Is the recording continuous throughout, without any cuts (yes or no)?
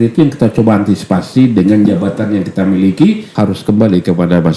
no